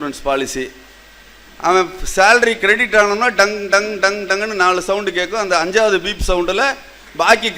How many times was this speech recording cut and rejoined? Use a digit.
0